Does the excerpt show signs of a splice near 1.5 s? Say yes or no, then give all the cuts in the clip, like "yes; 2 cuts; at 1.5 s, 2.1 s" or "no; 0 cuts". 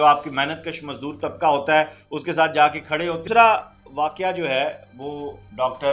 no; 1 cut; at 3.2 s